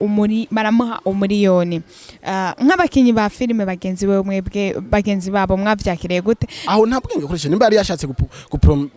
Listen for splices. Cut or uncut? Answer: cut